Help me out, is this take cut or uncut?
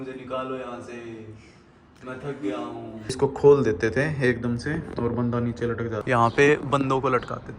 cut